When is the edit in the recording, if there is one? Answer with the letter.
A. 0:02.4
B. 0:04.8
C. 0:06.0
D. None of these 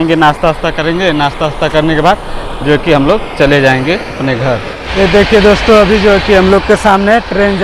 B